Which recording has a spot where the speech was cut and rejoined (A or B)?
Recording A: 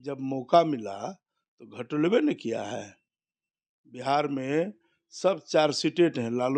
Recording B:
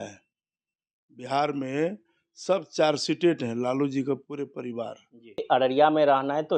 B